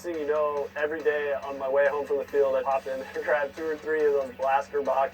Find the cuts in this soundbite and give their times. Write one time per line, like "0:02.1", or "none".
0:02.6